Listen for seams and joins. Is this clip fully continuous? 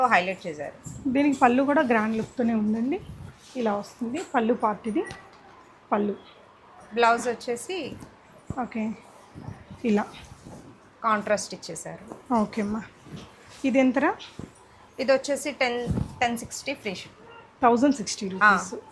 yes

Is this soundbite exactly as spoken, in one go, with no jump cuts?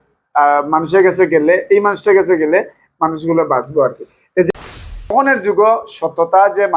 no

